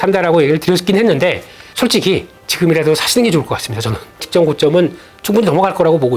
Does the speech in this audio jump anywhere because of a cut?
yes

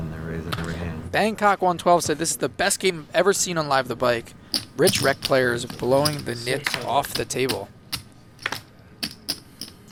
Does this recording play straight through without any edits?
yes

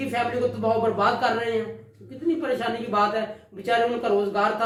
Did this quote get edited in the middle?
no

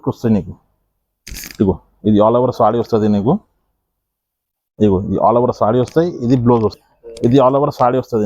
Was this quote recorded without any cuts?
no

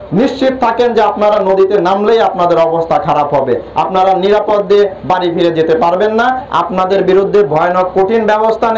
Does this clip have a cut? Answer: no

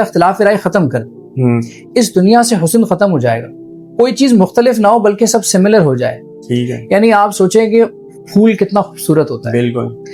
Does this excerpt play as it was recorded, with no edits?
yes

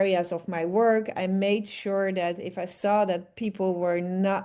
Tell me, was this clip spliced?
no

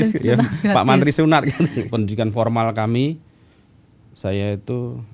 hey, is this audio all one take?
no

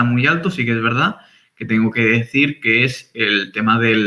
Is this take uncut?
yes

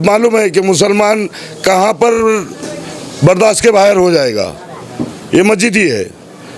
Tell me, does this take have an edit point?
no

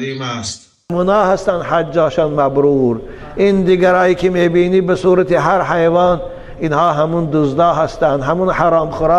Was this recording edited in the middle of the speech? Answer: yes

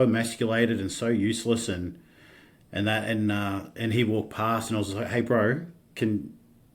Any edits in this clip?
no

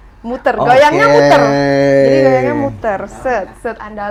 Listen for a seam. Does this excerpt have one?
no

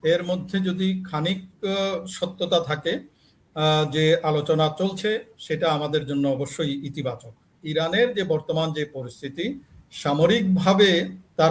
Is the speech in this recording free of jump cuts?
no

